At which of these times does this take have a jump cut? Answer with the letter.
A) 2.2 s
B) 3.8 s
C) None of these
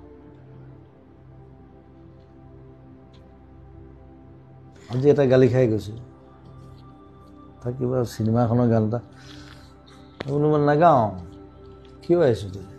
C